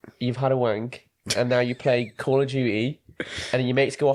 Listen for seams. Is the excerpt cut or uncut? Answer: uncut